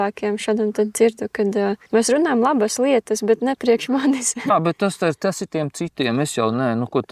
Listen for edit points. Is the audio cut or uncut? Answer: cut